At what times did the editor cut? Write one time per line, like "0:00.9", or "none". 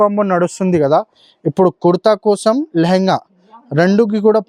none